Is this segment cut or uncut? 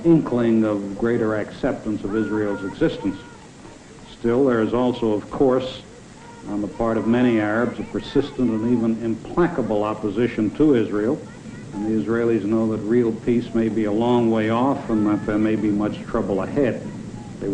cut